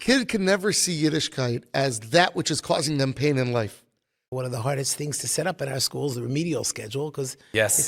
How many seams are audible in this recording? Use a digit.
1